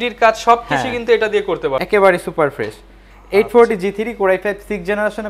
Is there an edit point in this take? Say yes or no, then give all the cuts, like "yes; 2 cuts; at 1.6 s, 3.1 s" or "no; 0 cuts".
yes; 1 cut; at 1.8 s